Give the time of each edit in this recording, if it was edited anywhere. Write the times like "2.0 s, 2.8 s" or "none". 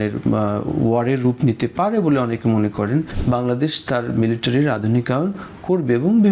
3.1 s